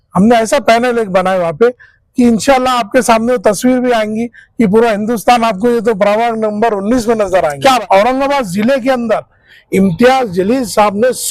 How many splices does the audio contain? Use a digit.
1